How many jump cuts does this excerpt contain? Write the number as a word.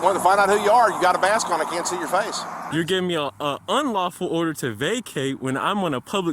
one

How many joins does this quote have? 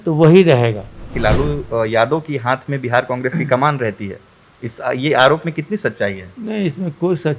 one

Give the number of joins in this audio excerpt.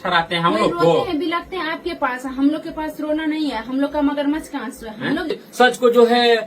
one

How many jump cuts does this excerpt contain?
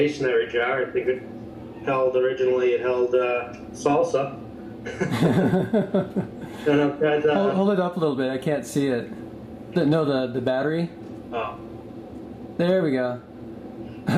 one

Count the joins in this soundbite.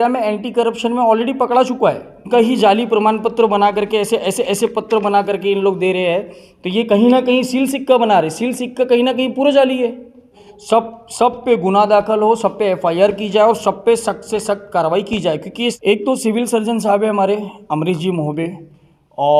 three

